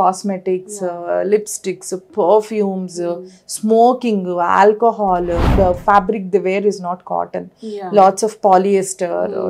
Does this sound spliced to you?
yes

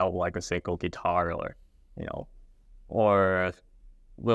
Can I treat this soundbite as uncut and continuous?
yes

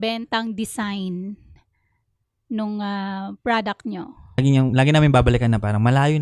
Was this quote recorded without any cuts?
no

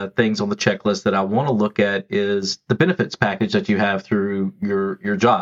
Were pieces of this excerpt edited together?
no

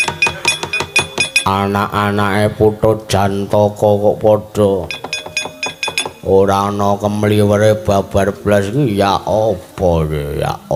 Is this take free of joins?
yes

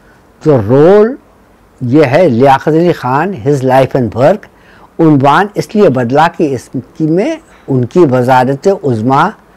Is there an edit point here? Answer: no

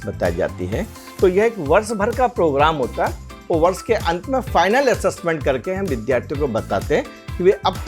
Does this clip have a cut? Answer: yes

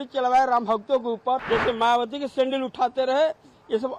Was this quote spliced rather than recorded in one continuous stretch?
yes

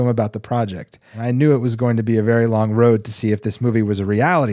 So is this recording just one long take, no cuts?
no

